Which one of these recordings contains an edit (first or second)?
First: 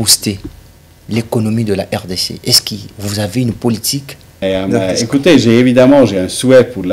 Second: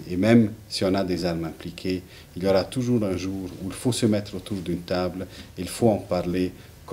first